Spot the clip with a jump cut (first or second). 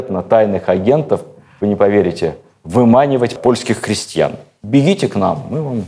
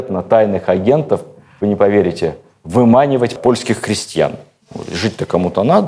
first